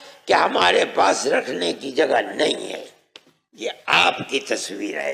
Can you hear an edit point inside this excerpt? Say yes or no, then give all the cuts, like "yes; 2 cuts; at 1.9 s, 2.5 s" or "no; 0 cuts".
no; 0 cuts